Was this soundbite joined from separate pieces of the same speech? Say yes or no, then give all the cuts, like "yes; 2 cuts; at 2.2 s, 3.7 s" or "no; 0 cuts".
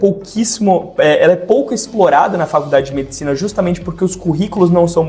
no; 0 cuts